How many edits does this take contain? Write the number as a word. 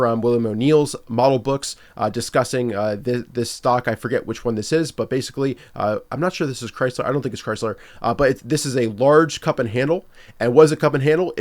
zero